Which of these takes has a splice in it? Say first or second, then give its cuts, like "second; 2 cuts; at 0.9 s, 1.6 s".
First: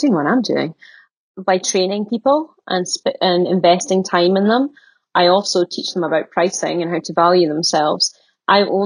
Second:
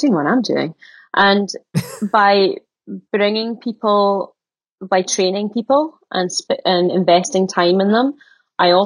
first; 1 cut; at 1.0 s